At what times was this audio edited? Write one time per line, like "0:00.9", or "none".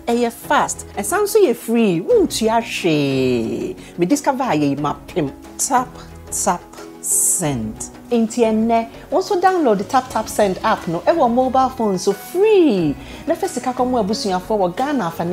none